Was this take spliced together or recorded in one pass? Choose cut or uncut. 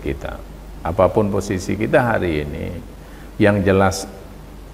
uncut